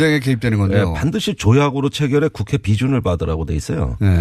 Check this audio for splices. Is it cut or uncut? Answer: cut